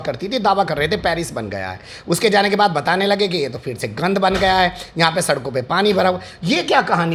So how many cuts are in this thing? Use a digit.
0